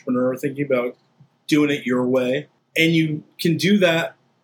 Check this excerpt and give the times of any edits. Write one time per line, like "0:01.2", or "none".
0:02.6